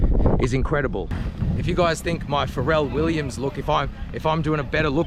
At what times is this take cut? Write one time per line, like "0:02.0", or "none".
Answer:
0:01.2